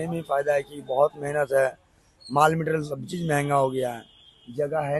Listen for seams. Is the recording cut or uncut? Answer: uncut